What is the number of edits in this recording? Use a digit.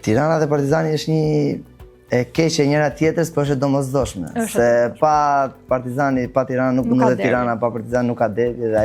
0